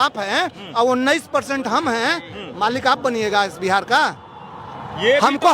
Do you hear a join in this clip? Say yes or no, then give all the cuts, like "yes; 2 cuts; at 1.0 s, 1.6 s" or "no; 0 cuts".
no; 0 cuts